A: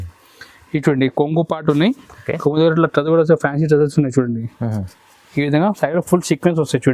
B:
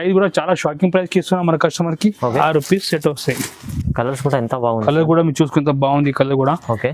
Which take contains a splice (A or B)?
B